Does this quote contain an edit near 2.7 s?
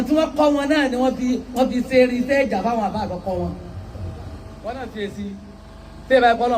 no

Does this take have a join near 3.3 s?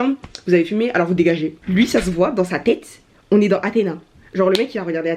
no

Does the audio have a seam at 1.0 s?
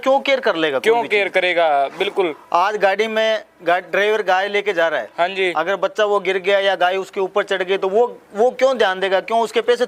no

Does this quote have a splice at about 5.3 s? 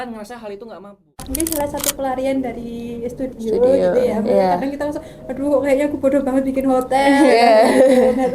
no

